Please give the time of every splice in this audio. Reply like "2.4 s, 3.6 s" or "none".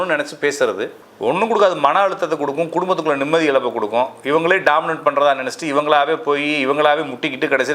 1.0 s